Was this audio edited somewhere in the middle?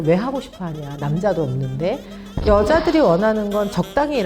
yes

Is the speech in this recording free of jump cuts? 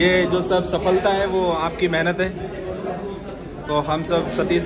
yes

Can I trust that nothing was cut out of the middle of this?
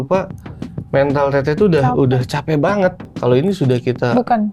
no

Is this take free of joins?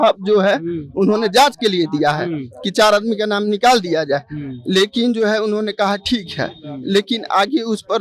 yes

